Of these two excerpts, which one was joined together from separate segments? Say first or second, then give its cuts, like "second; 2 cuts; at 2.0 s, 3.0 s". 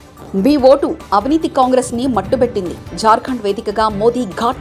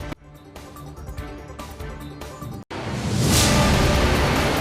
second; 1 cut; at 2.6 s